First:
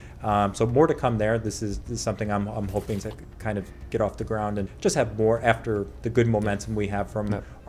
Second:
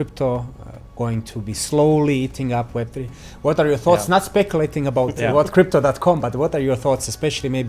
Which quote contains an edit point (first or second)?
first